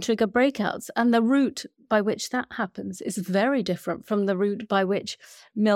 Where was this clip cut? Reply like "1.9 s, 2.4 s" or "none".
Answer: none